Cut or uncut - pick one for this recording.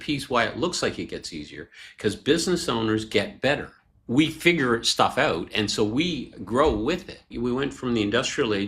cut